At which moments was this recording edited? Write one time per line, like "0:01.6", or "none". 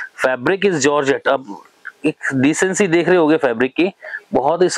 none